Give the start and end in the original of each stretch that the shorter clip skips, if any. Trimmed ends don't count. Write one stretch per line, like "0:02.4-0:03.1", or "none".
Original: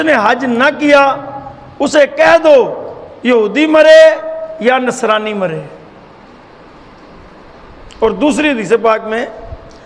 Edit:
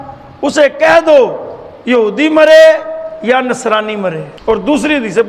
0:05.7-0:07.8